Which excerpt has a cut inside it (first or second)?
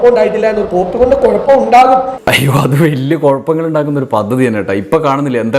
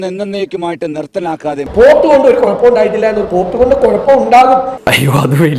second